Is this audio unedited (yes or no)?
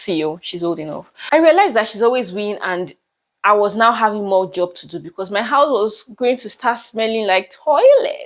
yes